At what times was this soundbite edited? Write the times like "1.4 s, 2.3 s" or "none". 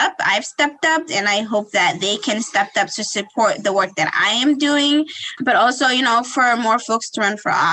none